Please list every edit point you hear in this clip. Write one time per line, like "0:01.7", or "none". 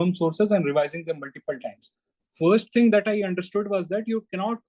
0:02.1